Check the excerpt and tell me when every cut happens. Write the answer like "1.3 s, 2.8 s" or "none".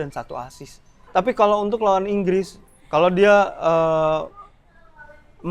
1.0 s